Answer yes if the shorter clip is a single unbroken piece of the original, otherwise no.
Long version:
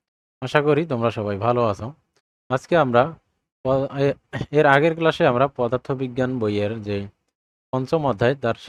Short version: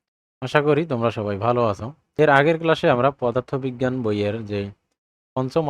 no